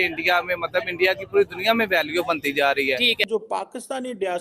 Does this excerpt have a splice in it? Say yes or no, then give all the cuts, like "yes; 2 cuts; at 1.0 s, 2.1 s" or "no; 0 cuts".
yes; 1 cut; at 3.2 s